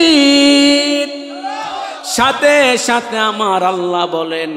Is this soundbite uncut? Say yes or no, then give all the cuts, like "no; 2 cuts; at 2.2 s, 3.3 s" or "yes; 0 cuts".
yes; 0 cuts